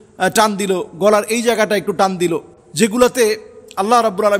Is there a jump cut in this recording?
yes; 1 cut; at 2.6 s

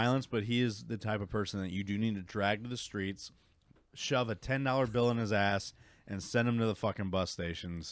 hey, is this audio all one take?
yes; 0 cuts

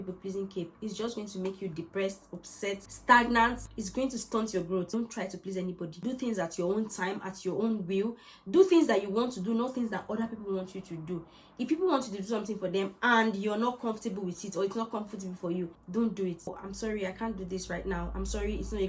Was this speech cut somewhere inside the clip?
no; 0 cuts

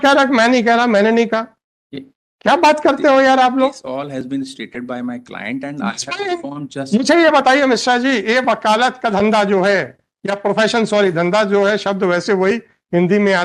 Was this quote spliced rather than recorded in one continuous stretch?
no; 0 cuts

